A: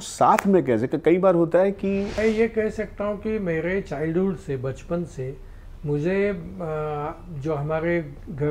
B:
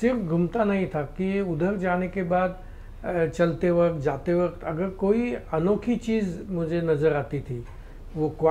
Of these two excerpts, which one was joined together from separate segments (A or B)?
A